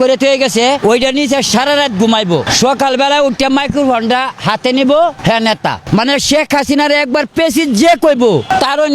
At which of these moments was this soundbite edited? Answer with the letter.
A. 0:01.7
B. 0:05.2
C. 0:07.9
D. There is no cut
D